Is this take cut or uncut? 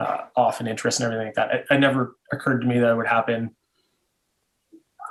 uncut